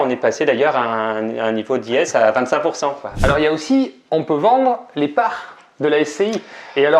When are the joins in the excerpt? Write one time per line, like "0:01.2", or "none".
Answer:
0:03.2